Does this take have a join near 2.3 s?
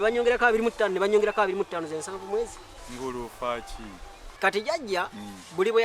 no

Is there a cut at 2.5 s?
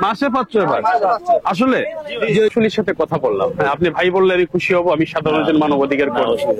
yes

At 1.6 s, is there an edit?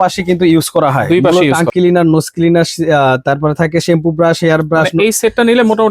yes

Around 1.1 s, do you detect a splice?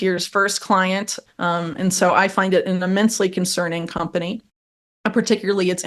yes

